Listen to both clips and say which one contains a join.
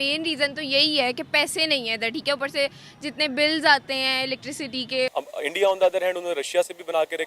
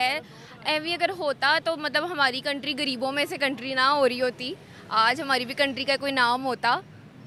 first; 1 cut; at 5.1 s

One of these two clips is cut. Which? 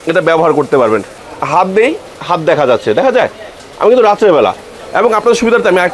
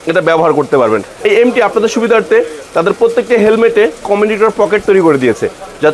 first; 1 cut; at 1.1 s

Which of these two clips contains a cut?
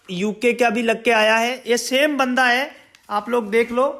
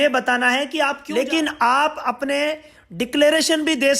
second; 1 cut; at 1.0 s

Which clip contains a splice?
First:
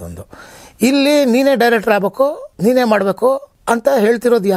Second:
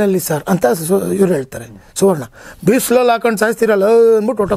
first; 2 cuts; at 2.5 s, 3.5 s

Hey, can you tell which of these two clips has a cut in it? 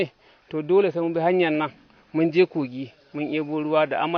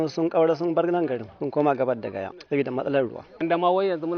second; 3 cuts; at 1.3 s, 2.4 s, 3.4 s

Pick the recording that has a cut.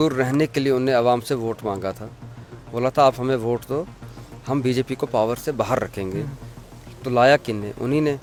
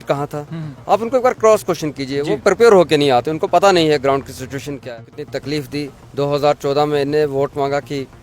second; 1 cut; at 4.9 s

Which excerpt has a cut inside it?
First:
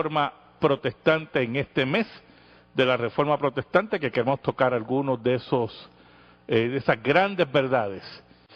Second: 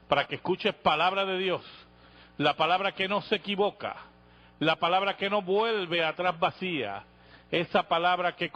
first; 1 cut; at 3.7 s

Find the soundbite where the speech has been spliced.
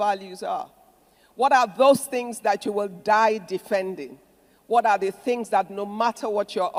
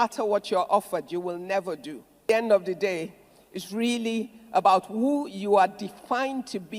second; 1 cut; at 2.0 s

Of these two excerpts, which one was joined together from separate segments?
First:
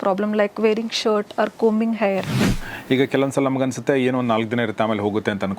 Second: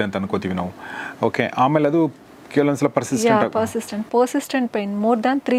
first; 1 cut; at 2.5 s

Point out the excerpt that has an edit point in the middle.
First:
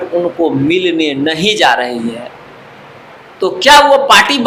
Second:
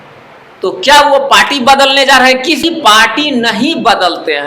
second; 1 cut; at 2.6 s

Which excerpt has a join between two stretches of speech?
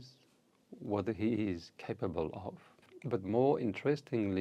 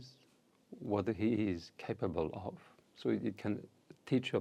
first; 1 cut; at 2.9 s

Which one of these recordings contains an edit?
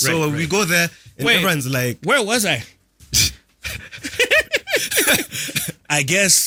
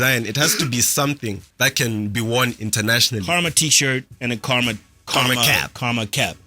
second; 4 cuts; at 1.5 s, 3.2 s, 4.1 s, 4.9 s

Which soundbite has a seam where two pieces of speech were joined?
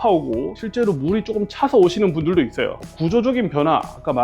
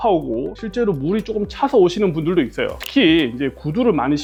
first; 1 cut; at 2.8 s

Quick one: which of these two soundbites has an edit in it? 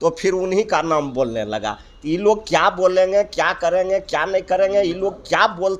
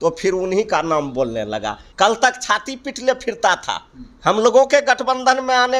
second; 1 cut; at 1.8 s

